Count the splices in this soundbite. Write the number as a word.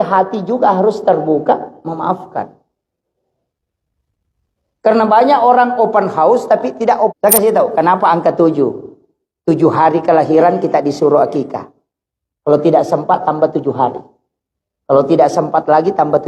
one